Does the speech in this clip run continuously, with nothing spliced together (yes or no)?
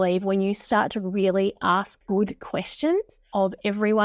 no